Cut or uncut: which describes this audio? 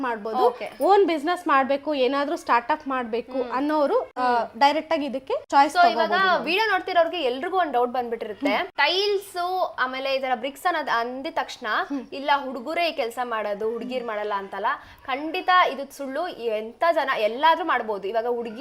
uncut